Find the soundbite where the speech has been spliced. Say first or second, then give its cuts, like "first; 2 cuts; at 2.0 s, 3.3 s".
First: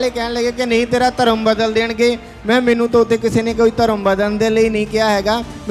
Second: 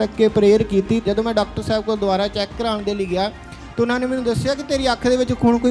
second; 1 cut; at 1.0 s